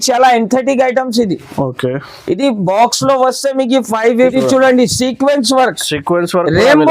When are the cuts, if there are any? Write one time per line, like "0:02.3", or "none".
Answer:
0:04.1